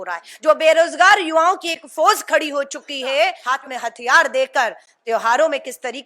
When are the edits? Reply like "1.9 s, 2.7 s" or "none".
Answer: 3.4 s